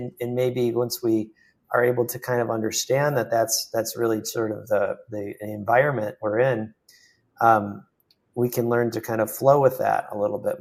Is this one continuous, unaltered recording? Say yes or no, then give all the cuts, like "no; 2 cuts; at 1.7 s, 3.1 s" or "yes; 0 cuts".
yes; 0 cuts